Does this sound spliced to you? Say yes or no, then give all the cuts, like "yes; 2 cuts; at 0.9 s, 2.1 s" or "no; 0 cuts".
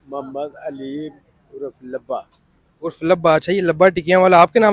no; 0 cuts